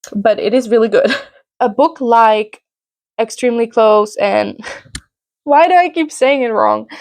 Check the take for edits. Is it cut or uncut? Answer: cut